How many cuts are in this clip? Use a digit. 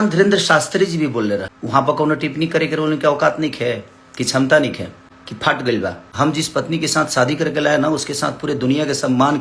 1